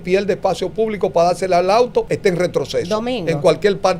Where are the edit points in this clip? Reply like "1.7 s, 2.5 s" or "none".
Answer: 2.1 s

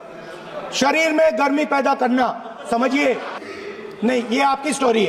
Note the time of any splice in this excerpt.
3.3 s

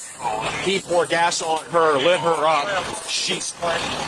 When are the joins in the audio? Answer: none

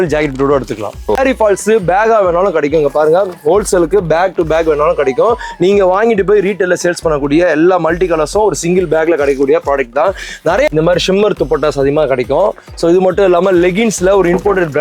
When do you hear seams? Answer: 1.2 s, 10.7 s

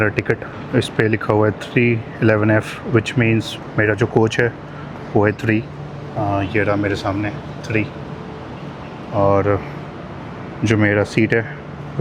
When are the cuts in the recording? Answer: none

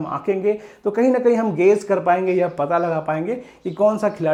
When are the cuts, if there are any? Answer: none

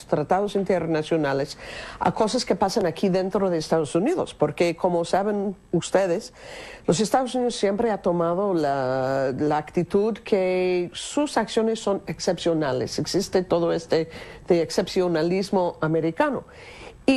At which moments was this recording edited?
12.2 s

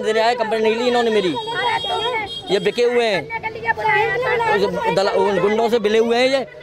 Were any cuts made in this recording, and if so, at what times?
none

